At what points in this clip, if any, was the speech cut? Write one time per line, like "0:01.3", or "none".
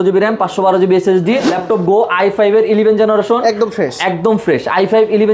0:01.5